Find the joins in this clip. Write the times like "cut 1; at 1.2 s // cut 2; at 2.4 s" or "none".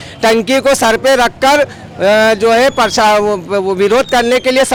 none

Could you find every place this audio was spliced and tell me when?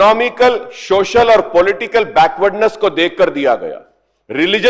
none

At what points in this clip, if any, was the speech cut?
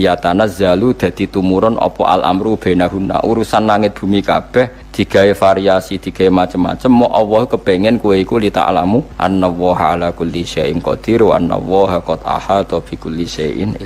cut 1; at 4.8 s // cut 2; at 9.1 s

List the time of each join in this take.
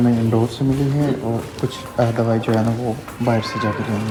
none

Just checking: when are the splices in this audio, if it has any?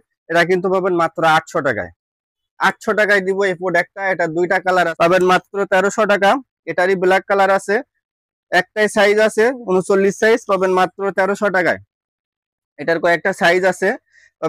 cut 1; at 4.9 s

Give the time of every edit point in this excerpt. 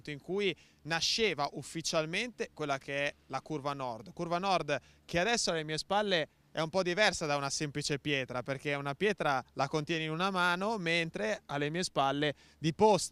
cut 1; at 10.4 s

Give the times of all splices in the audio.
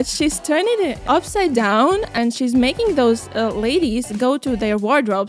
cut 1; at 1.0 s // cut 2; at 2.1 s

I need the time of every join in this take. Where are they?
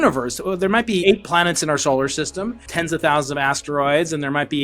cut 1; at 1.0 s // cut 2; at 2.6 s

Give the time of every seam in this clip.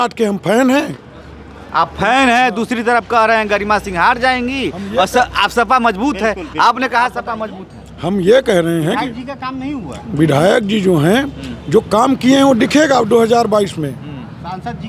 none

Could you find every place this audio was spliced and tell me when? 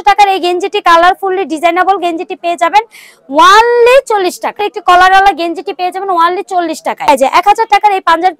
cut 1; at 4.7 s // cut 2; at 7.1 s

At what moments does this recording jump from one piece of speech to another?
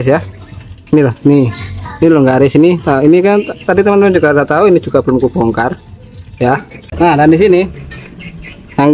cut 1; at 6.8 s

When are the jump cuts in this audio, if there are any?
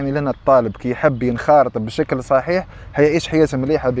none

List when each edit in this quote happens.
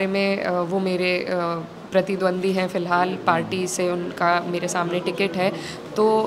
none

